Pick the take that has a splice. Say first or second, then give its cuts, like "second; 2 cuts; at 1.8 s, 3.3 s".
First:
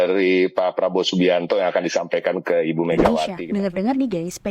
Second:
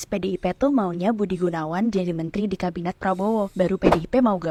first; 1 cut; at 3.3 s